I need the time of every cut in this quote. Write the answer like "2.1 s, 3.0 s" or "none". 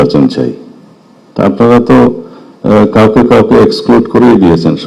none